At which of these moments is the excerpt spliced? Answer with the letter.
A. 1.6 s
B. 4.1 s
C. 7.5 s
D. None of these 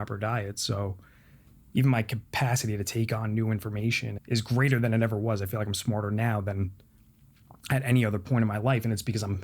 B